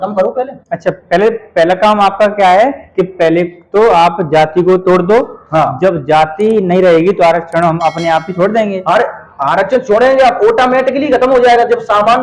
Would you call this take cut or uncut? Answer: uncut